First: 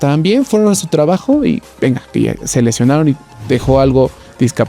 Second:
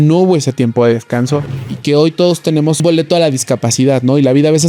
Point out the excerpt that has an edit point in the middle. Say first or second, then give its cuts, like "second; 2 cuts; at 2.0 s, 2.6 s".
second; 2 cuts; at 1.6 s, 2.8 s